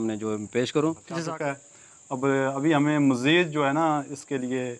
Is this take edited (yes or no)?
yes